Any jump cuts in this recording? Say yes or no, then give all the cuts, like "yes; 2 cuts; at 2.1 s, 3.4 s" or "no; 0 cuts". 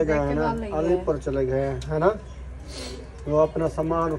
no; 0 cuts